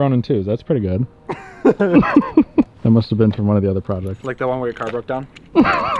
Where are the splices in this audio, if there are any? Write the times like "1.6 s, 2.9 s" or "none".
2.7 s

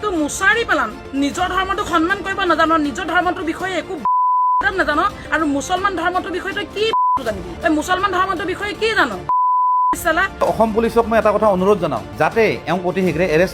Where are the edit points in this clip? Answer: 10.4 s

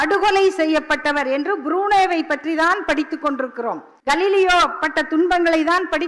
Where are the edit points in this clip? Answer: 3.9 s

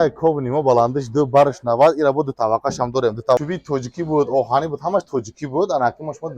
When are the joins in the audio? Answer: 3.4 s

